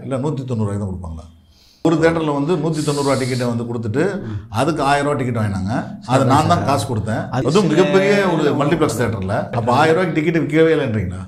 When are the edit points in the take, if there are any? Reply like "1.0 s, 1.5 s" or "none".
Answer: 1.8 s, 7.4 s, 9.5 s